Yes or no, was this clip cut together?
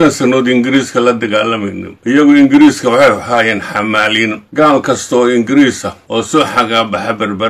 yes